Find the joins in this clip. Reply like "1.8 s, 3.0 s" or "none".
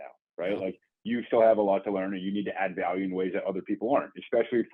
none